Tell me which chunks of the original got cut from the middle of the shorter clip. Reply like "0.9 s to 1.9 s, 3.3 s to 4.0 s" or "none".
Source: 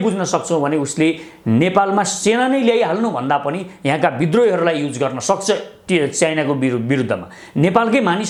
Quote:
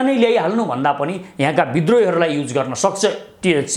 none